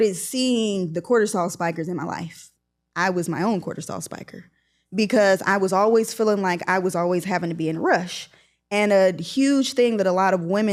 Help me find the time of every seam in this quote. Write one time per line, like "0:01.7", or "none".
none